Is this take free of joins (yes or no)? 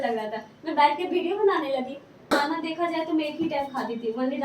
no